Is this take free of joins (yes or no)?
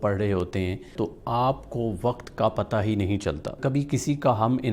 no